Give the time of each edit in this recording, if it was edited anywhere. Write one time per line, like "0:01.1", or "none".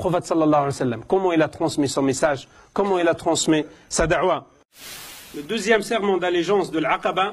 none